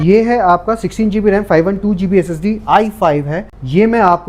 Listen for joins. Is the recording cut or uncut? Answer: uncut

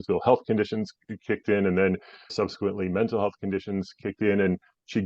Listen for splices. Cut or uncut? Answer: cut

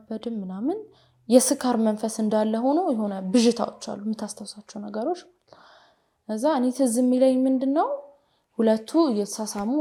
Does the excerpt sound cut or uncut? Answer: uncut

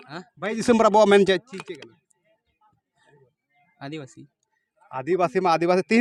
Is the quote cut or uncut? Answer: uncut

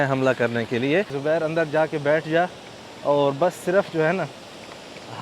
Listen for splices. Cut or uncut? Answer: cut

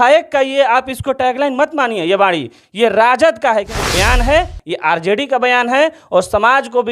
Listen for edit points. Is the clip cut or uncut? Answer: cut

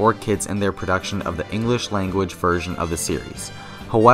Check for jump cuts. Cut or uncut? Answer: cut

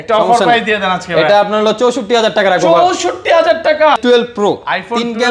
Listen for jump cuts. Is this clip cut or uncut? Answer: cut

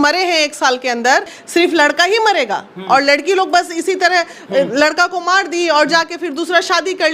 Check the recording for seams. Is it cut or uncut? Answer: cut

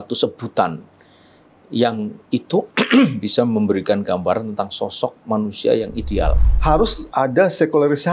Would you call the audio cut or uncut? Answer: cut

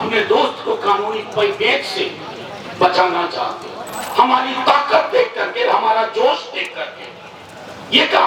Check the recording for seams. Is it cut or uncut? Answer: cut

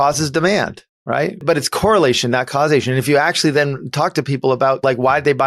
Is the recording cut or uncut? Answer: cut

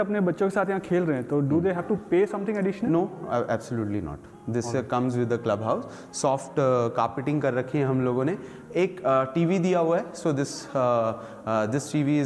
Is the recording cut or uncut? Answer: uncut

